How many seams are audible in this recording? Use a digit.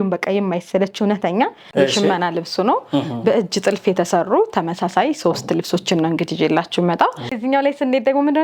2